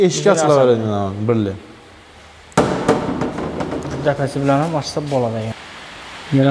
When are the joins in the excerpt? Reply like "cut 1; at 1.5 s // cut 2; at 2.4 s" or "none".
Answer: cut 1; at 5.5 s